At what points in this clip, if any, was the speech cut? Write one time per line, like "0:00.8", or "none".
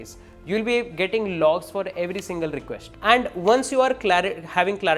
0:02.8

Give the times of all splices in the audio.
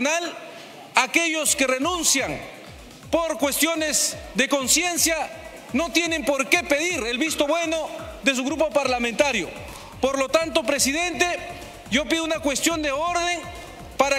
none

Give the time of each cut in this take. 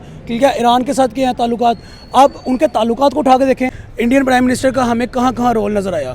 0:03.8

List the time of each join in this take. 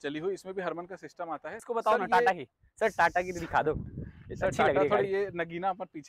0:01.6

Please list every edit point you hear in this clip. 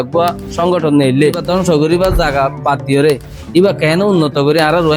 0:01.4

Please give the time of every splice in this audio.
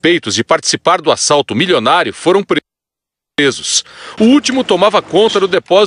0:02.8

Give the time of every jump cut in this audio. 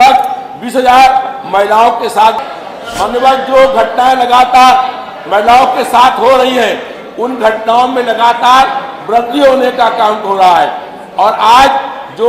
0:02.4

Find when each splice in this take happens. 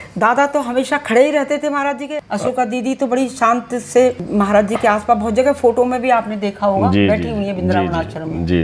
0:02.1
0:04.2

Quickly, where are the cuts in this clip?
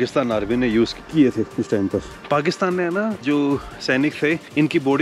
0:02.1
0:03.2

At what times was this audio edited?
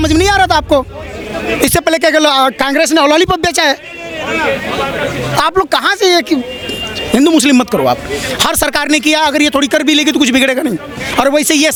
none

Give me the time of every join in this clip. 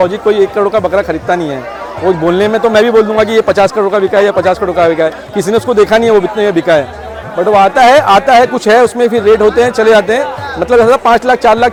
none

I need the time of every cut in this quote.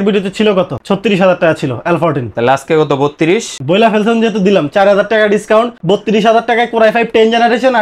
none

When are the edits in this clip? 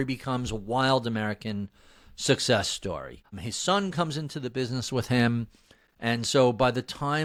none

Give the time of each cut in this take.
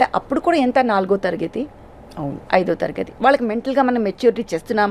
none

